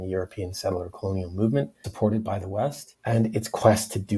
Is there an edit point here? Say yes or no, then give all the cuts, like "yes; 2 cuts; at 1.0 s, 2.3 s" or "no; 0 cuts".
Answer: yes; 2 cuts; at 1.8 s, 2.9 s